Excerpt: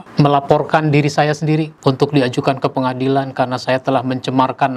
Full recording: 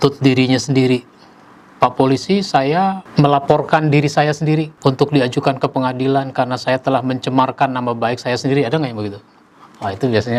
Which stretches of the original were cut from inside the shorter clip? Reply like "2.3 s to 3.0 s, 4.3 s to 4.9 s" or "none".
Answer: none